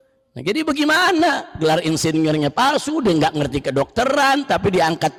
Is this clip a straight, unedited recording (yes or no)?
yes